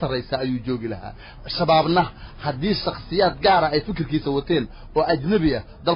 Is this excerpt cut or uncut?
uncut